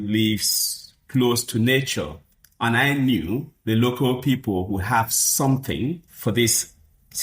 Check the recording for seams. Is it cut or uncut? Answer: cut